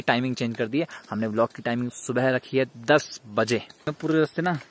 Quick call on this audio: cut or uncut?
cut